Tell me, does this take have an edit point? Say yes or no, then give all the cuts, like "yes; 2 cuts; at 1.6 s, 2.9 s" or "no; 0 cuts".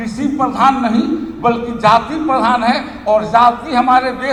no; 0 cuts